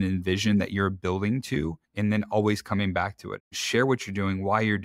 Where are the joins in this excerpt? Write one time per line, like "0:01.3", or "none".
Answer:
0:01.8
0:03.5